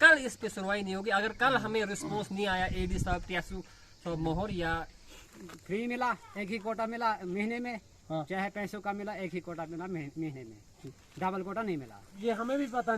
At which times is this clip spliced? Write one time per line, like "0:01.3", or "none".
0:05.2
0:12.2